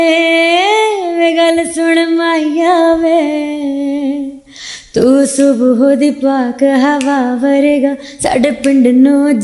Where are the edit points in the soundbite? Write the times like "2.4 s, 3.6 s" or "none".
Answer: none